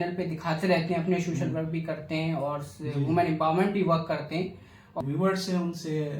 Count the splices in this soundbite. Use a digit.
1